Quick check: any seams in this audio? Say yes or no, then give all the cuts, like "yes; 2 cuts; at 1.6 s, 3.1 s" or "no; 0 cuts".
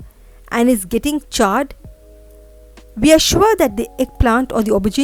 no; 0 cuts